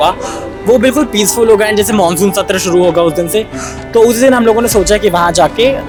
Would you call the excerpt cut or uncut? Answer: uncut